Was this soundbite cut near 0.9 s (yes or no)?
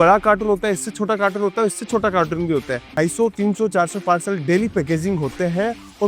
no